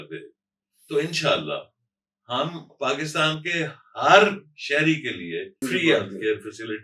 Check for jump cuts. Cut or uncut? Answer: cut